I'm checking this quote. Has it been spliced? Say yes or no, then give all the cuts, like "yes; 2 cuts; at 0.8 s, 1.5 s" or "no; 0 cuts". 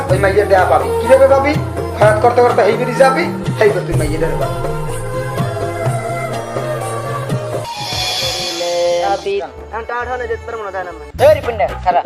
yes; 1 cut; at 9.5 s